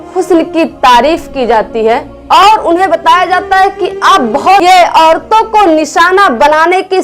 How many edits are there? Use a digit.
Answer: 1